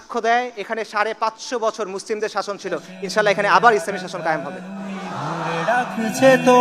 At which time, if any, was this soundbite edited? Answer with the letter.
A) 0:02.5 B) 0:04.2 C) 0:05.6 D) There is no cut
C